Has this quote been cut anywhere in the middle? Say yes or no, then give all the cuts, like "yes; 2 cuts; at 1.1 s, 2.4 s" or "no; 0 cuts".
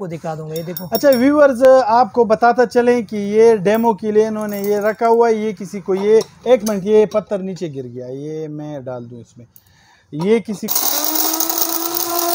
yes; 1 cut; at 10.7 s